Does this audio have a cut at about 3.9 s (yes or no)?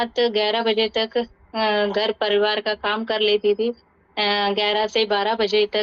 no